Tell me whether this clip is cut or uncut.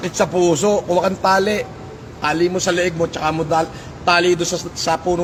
uncut